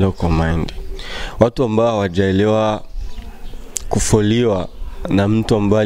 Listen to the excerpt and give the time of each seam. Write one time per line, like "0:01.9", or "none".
none